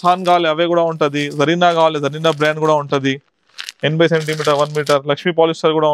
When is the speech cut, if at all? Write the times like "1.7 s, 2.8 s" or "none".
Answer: none